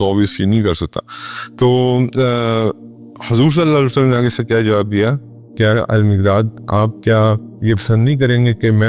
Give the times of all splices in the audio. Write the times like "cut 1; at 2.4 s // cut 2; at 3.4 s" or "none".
none